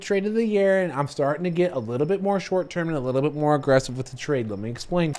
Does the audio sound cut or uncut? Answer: uncut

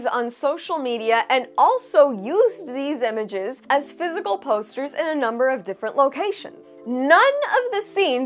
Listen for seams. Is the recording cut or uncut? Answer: cut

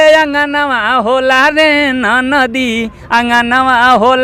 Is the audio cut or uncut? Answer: uncut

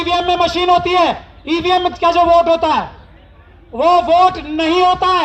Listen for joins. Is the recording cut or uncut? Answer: uncut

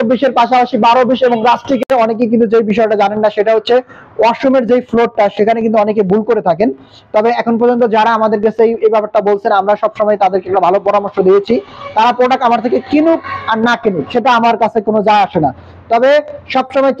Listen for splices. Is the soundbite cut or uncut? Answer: cut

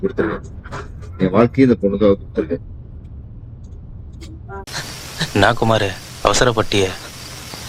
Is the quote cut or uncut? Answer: cut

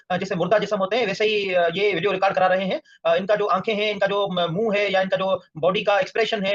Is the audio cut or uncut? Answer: uncut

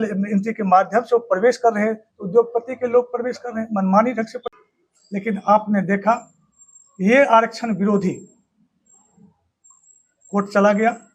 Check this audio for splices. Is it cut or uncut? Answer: cut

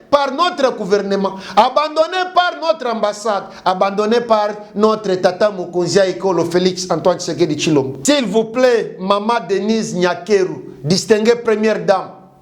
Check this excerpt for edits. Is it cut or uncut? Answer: cut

